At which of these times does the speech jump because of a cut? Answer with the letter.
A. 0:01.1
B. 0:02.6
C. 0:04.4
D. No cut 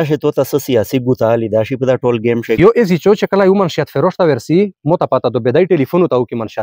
B